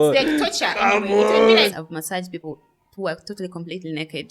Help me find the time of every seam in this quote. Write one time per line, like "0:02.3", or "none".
0:01.7